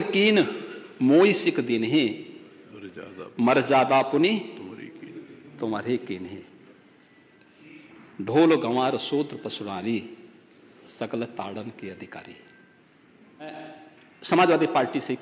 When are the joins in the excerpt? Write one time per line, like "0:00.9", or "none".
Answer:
0:13.4